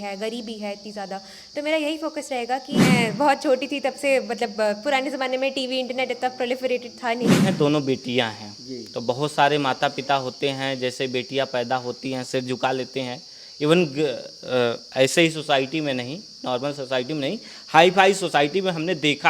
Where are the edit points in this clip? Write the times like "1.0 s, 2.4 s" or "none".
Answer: 2.8 s, 7.4 s